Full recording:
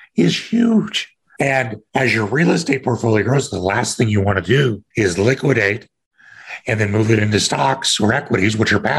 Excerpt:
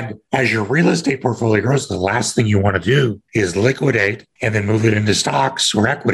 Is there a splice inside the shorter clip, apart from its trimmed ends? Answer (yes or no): yes